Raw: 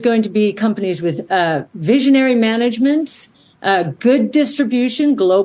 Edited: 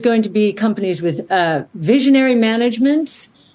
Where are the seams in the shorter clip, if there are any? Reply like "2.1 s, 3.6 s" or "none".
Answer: none